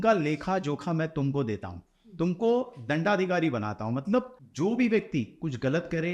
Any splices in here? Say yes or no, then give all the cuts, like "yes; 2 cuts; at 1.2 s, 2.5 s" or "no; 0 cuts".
yes; 1 cut; at 4.4 s